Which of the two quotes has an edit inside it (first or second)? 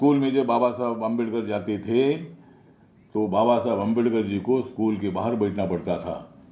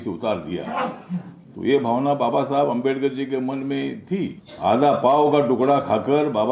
second